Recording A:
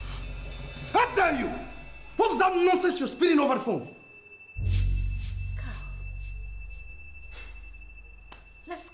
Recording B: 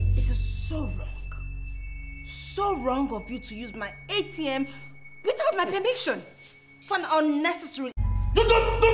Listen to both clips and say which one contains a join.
B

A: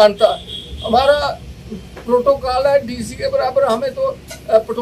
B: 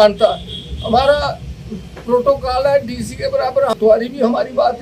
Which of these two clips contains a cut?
B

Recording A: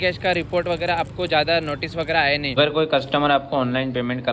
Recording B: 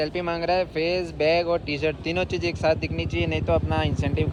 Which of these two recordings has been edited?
A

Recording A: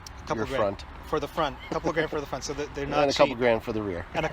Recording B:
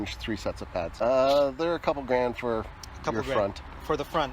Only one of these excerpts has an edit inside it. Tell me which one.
B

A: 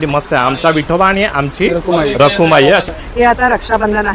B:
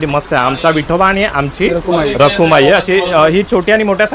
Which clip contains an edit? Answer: A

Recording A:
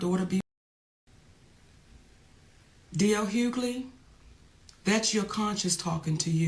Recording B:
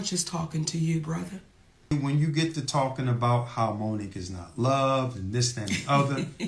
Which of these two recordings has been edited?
B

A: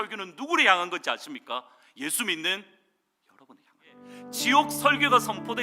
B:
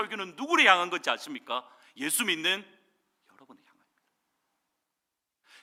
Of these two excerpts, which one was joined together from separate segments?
A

